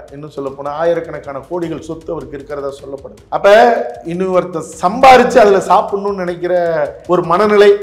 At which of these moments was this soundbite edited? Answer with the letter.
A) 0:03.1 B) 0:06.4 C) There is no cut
A